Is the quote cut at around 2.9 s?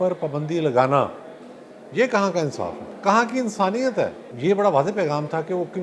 yes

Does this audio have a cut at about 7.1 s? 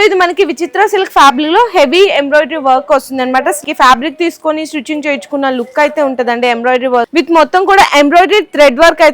yes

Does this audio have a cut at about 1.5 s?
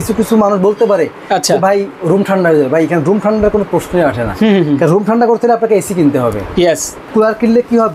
no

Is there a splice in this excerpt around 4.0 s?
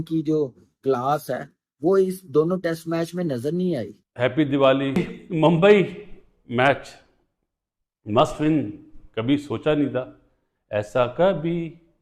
yes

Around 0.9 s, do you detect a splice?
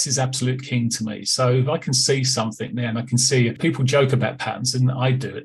no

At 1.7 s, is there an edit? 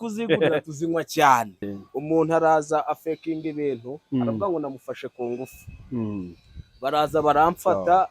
yes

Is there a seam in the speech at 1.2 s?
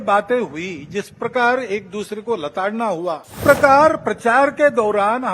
no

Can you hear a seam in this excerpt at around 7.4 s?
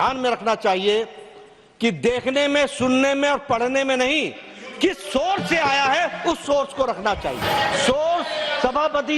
yes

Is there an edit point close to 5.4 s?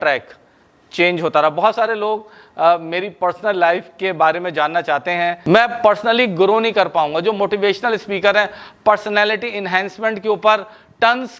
yes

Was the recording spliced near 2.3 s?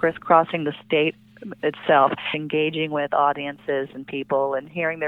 yes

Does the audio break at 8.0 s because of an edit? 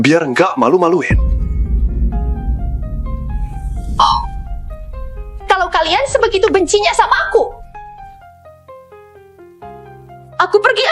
yes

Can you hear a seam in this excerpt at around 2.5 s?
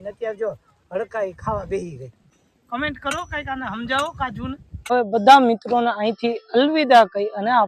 yes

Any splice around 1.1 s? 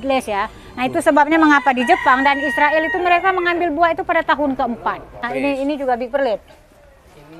no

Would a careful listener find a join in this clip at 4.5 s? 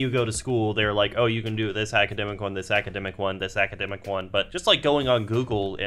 yes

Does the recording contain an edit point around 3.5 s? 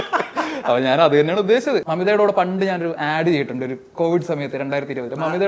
no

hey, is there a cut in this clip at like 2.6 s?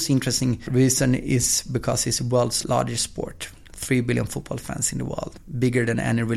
yes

